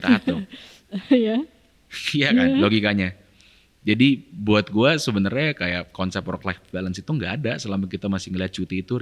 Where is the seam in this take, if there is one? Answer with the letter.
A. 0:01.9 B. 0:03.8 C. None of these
C